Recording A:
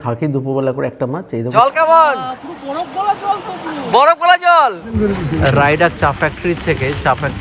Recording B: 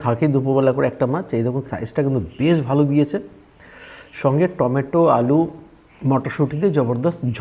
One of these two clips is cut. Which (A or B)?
A